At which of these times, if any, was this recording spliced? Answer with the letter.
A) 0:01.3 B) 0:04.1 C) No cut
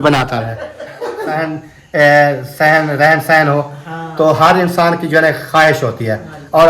A